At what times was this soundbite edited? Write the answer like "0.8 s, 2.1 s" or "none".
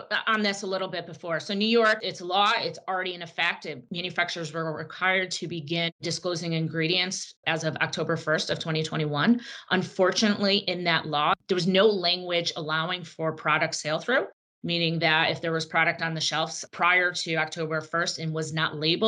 3.8 s